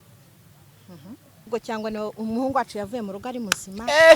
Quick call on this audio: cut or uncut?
cut